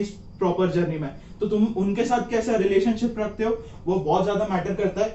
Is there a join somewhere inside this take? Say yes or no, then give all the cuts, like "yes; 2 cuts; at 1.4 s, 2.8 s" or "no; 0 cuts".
no; 0 cuts